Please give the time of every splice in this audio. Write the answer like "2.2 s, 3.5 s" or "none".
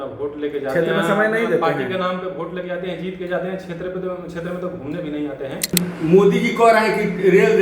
5.7 s